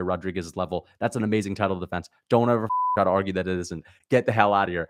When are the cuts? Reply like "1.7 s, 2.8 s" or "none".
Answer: none

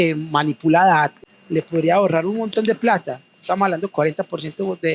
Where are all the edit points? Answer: 1.3 s

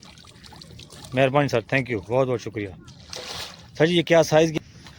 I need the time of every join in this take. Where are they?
none

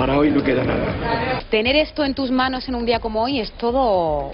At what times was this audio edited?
none

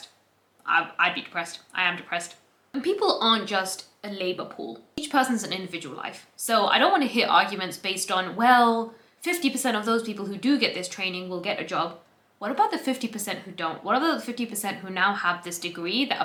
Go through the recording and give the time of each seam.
none

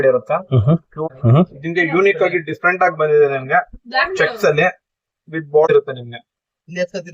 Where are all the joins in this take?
1.1 s, 5.7 s

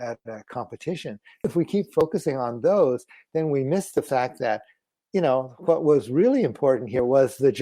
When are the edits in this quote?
1.4 s

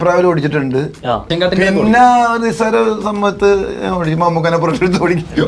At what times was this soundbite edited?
1.3 s

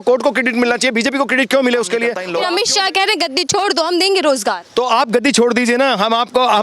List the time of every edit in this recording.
2.3 s

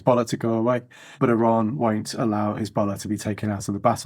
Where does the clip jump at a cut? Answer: none

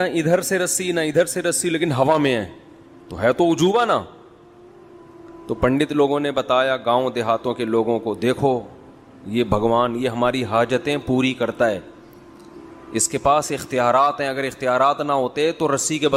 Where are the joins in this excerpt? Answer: none

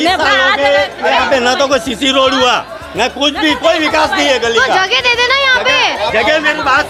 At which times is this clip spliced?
none

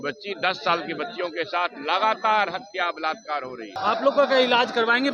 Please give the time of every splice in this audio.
3.7 s

